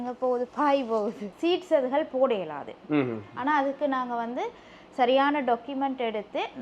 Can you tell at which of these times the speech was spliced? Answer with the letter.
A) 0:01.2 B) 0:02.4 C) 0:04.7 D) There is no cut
A